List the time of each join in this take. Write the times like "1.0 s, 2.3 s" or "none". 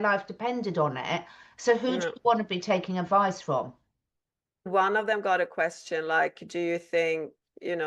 4.7 s